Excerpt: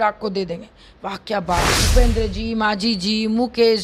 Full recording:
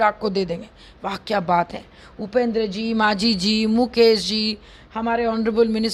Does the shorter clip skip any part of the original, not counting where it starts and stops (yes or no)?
yes